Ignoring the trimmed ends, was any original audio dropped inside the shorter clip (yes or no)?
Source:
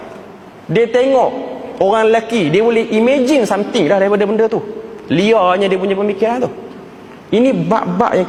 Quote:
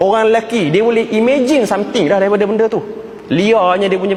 no